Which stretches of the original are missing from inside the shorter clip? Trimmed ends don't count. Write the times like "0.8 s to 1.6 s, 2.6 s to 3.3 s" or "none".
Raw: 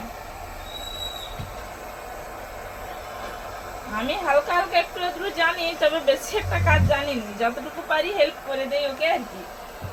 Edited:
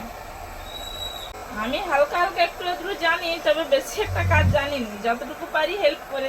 1.4 s to 3.7 s

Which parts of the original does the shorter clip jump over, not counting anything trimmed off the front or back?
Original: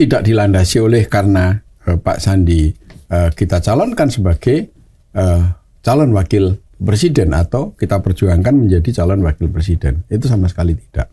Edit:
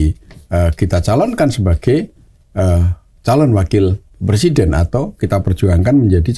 none

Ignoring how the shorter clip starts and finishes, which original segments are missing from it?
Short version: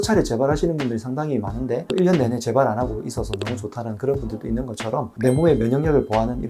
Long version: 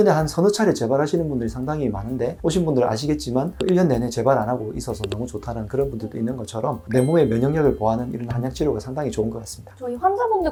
2.3 s to 3.5 s

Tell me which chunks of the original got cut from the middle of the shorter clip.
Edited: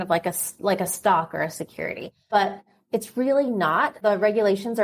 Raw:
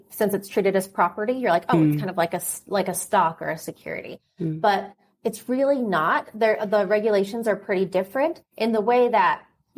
4.3 s to 4.6 s, 6.3 s to 6.6 s

